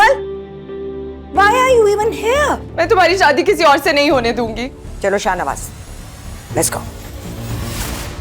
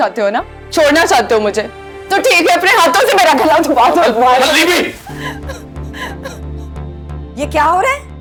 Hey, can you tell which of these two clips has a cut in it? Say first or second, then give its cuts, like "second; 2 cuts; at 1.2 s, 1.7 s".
first; 2 cuts; at 2.7 s, 4.8 s